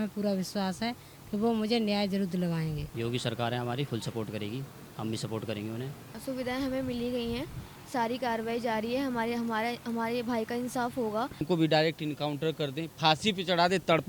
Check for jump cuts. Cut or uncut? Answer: cut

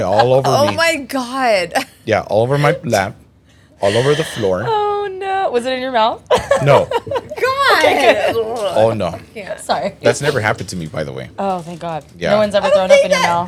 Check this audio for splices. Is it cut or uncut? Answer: uncut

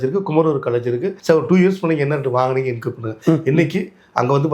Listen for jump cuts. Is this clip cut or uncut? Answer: cut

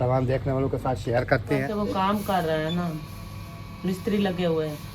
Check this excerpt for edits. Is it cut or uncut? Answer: cut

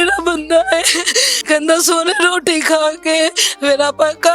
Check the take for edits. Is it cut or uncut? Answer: cut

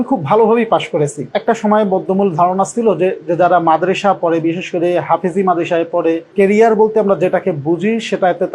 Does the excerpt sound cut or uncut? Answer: cut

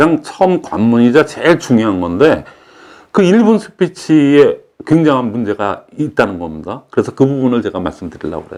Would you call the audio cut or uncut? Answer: uncut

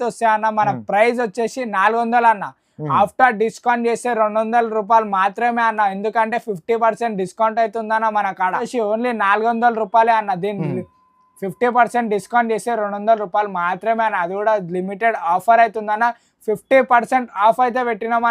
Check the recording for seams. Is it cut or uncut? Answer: cut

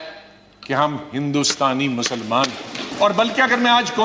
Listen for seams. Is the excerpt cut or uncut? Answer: cut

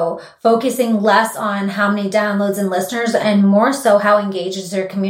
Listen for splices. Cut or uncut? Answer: uncut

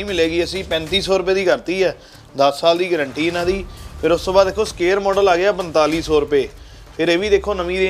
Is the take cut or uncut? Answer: uncut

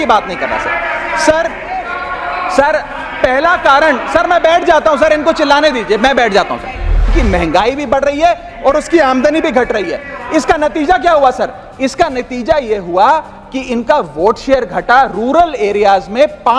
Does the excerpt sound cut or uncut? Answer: cut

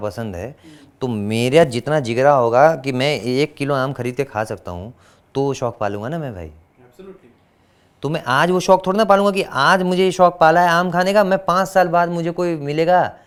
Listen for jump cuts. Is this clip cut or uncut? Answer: uncut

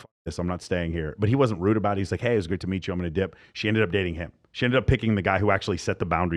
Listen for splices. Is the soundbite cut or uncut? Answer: uncut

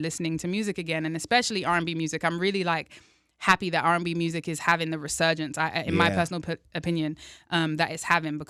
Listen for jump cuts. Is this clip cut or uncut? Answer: uncut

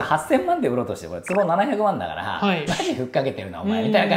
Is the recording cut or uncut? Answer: uncut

